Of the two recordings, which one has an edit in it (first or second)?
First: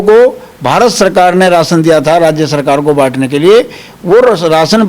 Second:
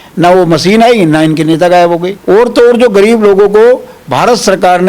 second